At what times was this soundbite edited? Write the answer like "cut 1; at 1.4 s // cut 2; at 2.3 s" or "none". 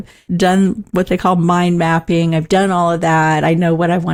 none